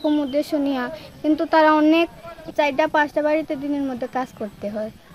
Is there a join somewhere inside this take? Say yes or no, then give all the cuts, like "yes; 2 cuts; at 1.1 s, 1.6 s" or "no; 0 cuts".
yes; 1 cut; at 2.5 s